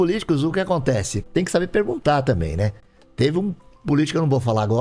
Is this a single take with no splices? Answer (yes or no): no